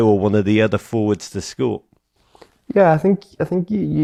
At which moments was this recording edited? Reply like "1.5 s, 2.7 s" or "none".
none